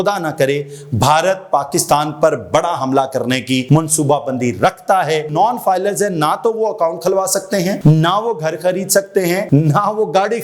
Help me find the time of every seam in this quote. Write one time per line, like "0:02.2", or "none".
0:03.6
0:05.3
0:07.8
0:09.5